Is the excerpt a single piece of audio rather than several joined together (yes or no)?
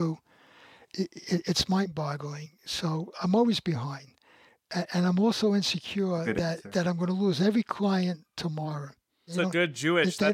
no